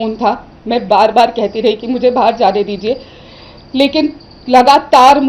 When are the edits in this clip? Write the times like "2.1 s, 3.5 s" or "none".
none